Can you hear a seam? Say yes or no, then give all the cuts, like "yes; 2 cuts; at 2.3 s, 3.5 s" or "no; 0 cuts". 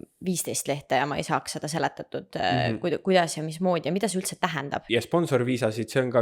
yes; 1 cut; at 4.7 s